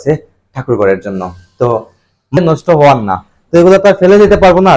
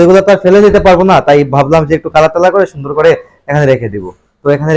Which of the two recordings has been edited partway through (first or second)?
first